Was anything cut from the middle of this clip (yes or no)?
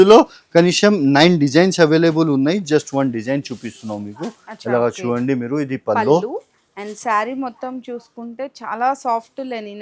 no